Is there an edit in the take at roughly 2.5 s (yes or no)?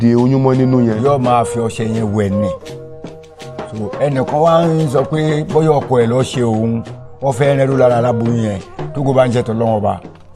no